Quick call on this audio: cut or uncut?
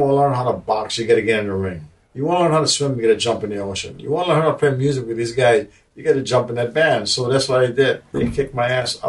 cut